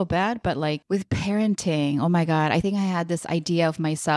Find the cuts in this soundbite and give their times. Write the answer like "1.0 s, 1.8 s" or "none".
0.8 s, 2.6 s